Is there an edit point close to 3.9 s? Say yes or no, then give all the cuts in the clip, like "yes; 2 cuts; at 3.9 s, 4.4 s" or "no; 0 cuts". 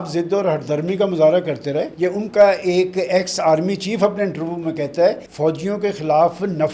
no; 2 cuts; at 1.9 s, 5.3 s